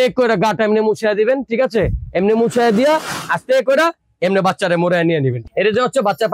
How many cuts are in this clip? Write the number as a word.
one